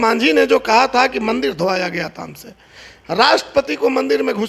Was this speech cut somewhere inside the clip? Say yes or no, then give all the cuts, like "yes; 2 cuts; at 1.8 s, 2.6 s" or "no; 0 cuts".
no; 0 cuts